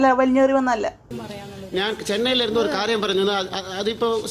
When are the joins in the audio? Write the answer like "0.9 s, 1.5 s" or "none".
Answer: 1.1 s